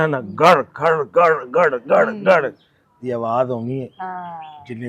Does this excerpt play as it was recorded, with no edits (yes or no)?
yes